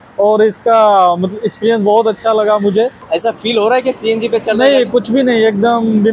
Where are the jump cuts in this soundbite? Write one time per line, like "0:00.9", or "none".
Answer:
0:03.0

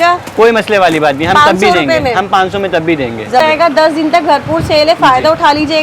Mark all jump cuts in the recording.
0:03.4

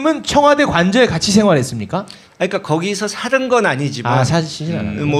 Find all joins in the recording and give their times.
0:03.8

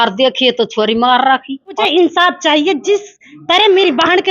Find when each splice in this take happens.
0:01.8

